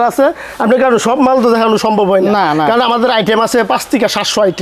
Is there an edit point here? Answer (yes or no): no